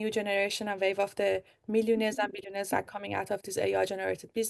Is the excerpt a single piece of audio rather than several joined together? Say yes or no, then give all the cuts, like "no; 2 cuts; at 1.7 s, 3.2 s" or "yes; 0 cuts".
yes; 0 cuts